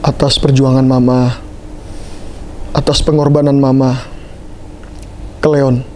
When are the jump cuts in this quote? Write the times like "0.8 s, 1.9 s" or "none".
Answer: none